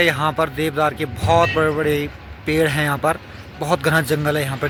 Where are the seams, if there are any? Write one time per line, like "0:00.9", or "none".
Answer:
none